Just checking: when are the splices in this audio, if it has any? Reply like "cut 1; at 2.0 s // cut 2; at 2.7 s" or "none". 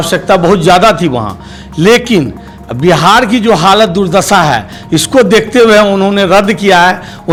none

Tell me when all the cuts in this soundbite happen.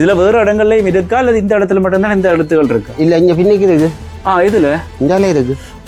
none

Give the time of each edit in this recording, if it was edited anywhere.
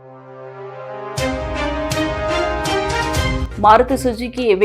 cut 1; at 1.2 s // cut 2; at 3.4 s

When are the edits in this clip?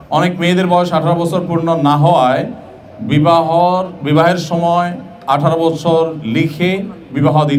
none

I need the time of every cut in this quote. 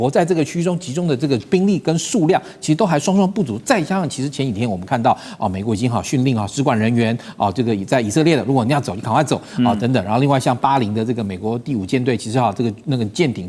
none

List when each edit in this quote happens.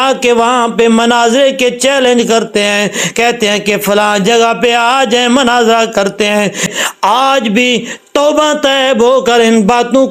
none

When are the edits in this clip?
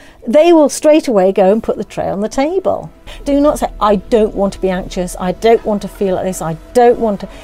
cut 1; at 3.2 s

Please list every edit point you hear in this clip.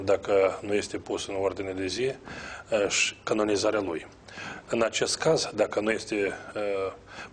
none

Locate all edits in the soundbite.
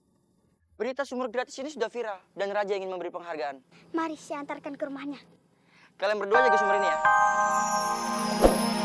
cut 1; at 6.4 s

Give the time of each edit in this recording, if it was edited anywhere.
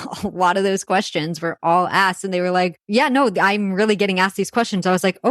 cut 1; at 2.8 s

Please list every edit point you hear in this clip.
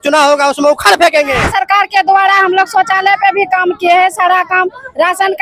cut 1; at 1.4 s

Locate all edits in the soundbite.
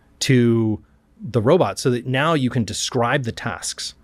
none

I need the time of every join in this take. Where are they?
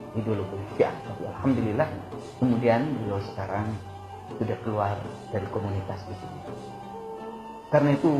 cut 1; at 3.5 s

